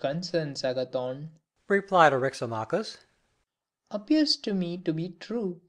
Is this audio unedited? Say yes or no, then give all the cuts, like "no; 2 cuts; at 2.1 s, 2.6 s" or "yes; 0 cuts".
yes; 0 cuts